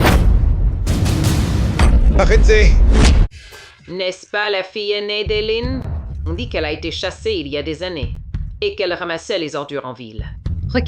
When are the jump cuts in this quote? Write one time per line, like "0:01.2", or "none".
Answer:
0:03.3

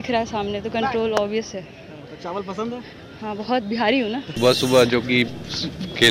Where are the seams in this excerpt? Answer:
0:04.3

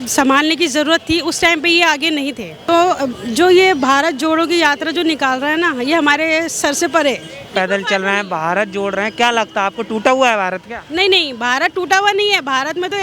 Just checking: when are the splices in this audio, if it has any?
0:02.5
0:07.5

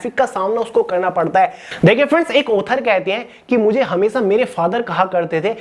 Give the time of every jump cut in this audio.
0:01.7

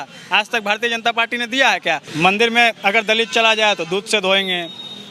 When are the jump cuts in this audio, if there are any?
0:02.1

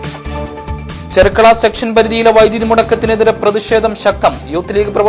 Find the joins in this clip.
none

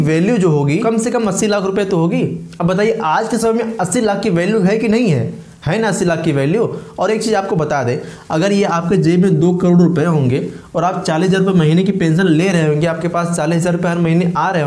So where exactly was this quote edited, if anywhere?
none

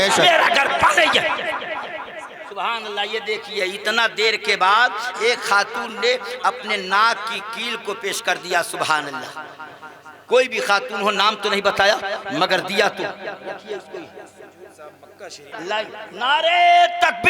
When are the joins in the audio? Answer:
0:02.4
0:15.5

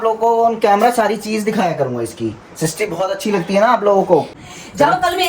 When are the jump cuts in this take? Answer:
0:04.4

